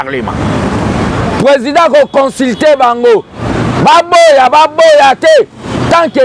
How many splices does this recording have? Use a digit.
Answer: 1